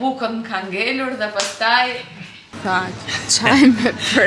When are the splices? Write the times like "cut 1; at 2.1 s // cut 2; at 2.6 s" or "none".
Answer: cut 1; at 2.4 s

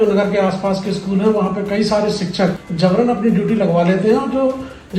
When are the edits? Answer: cut 1; at 2.6 s

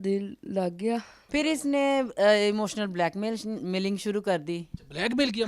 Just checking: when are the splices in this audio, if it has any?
cut 1; at 1.1 s

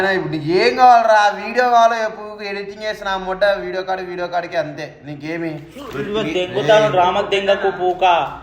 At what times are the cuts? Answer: none

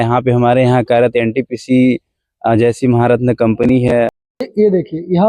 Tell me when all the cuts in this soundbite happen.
cut 1; at 4.1 s

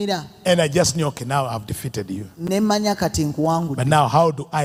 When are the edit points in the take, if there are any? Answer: none

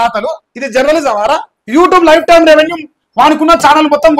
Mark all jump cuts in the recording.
cut 1; at 1.5 s

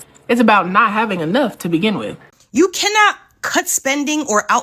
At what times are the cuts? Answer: cut 1; at 2.3 s

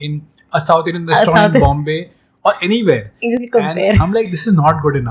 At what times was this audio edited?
none

